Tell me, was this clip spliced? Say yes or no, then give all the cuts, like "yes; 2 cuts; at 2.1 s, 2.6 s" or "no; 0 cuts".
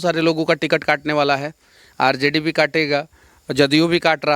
no; 0 cuts